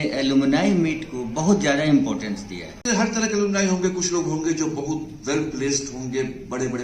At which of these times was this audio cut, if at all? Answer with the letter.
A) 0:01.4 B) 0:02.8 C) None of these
B